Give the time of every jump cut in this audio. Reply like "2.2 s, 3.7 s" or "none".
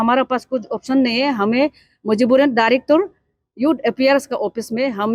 none